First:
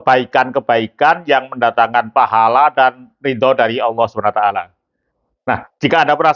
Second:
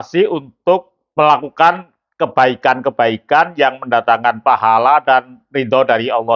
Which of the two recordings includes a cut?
second; 1 cut; at 1.0 s

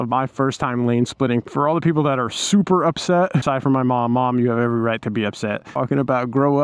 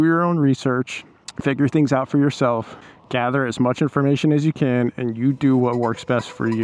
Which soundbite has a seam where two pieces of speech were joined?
first; 2 cuts; at 1.4 s, 5.7 s

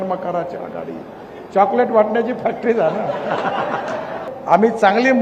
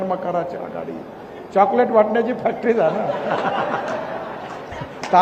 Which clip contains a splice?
first; 1 cut; at 4.3 s

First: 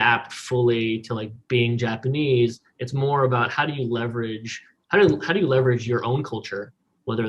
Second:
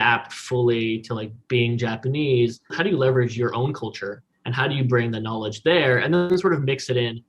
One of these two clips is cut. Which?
second; 3 cuts; at 2.7 s, 4.3 s, 6.3 s

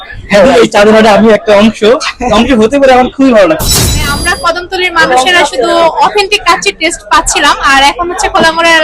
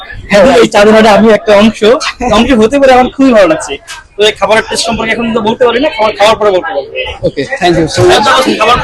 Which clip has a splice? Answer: first; 1 cut; at 4.1 s

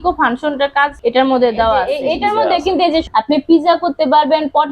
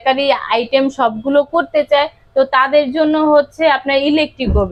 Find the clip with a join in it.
first; 3 cuts; at 1.0 s, 1.9 s, 3.1 s

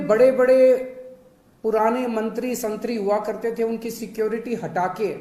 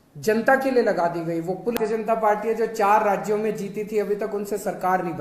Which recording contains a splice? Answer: second; 1 cut; at 1.8 s

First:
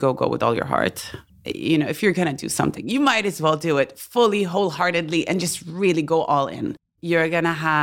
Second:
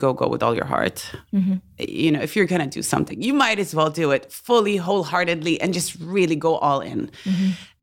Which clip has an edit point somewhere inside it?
first; 2 cuts; at 1.3 s, 6.8 s

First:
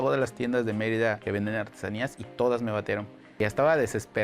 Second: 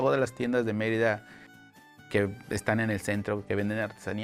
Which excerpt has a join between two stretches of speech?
first; 2 cuts; at 1.2 s, 3.4 s

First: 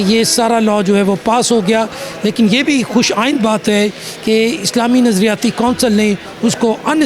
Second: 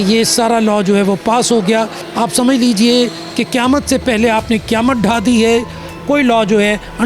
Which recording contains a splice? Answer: second; 2 cuts; at 2.0 s, 5.9 s

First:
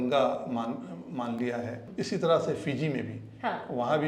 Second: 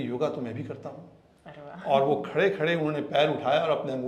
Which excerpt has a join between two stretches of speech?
first; 1 cut; at 1.8 s

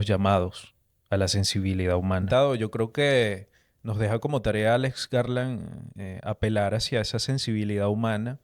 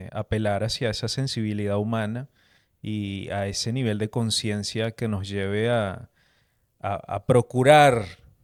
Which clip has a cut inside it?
first; 1 cut; at 2.2 s

